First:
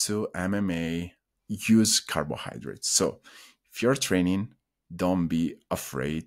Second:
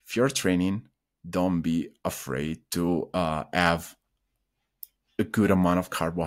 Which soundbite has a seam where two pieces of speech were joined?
first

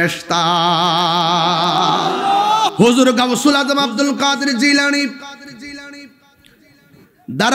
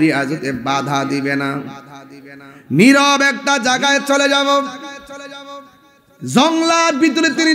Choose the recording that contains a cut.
first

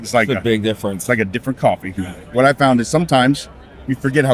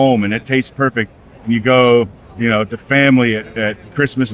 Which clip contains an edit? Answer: first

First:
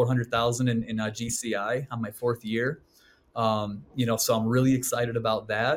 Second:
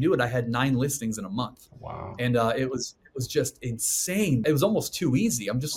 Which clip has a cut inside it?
second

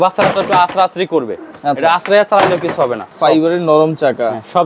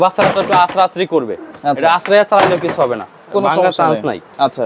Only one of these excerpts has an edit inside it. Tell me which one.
first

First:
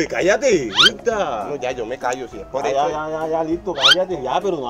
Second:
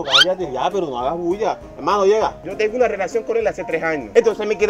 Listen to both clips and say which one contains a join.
second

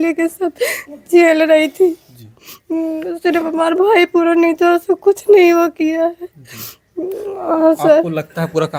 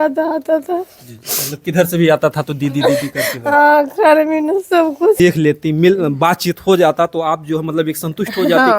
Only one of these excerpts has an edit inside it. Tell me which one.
second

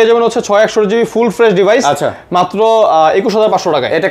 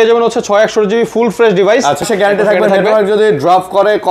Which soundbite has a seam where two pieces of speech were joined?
second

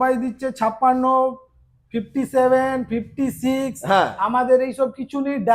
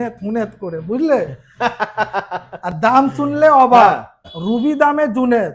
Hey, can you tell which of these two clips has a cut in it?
second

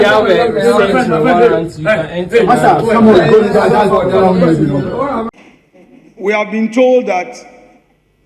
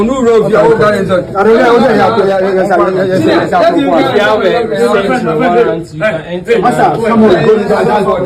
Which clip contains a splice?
first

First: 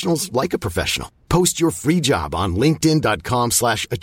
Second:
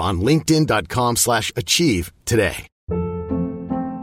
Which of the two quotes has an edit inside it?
second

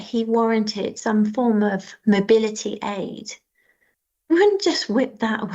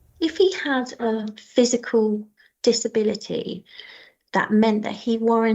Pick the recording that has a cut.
second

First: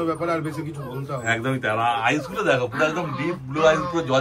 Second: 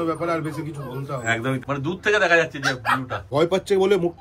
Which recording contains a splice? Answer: second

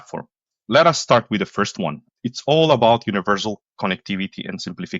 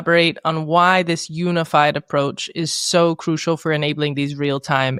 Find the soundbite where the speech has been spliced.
first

